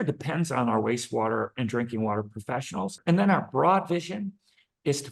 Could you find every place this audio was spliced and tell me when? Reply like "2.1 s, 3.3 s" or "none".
3.0 s